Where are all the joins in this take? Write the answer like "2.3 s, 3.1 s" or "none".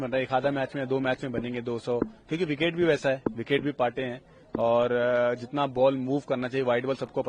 none